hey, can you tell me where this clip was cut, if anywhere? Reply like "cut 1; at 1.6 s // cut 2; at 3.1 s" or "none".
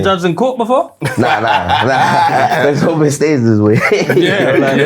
none